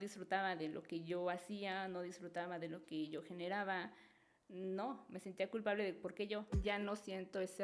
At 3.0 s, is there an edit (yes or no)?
no